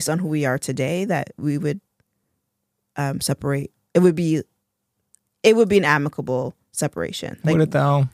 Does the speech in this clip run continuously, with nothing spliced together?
yes; 0 cuts

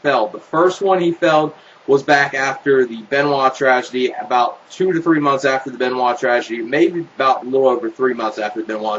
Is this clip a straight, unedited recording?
no; 1 cut; at 3.7 s

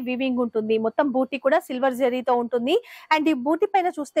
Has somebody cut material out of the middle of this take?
no; 0 cuts

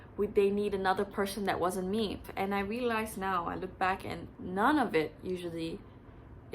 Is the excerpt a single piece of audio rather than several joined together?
no; 1 cut; at 2.3 s

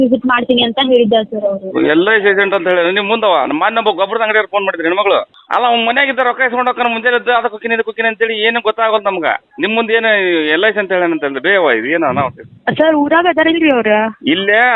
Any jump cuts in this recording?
yes; 2 cuts; at 5.4 s, 12.5 s

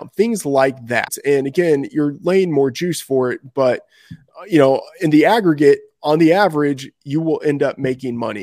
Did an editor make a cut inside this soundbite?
yes; 1 cut; at 1.1 s

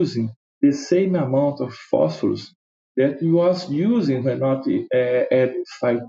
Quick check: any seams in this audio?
no; 0 cuts

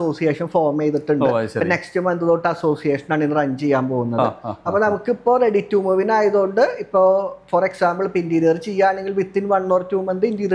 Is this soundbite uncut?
yes; 0 cuts

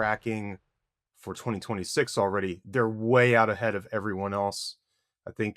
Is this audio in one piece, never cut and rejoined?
yes; 0 cuts

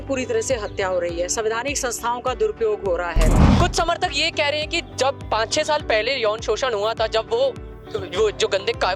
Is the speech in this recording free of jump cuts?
no; 1 cut; at 3.4 s

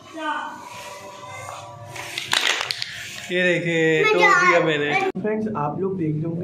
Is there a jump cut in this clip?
no; 0 cuts

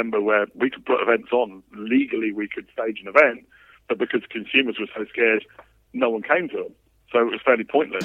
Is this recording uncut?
yes; 0 cuts

